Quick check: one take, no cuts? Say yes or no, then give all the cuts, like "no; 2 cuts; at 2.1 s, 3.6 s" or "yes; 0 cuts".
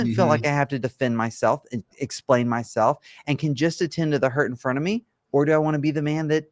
yes; 0 cuts